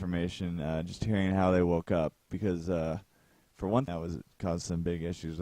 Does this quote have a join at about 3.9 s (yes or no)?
no